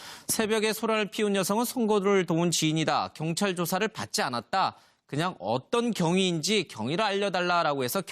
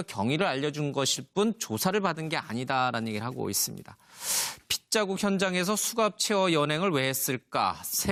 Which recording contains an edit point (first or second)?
first